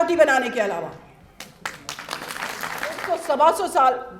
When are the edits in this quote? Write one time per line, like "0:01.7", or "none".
0:03.1